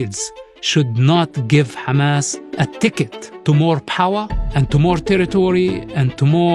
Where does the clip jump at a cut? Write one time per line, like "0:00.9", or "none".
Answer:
0:02.4
0:03.3